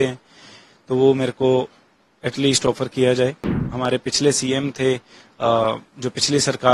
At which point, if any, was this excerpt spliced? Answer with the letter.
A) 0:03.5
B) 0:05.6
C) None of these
A